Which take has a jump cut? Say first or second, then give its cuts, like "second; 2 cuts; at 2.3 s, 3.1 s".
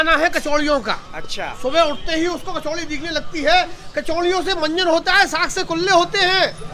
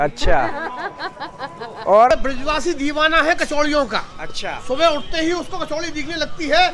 second; 1 cut; at 2.1 s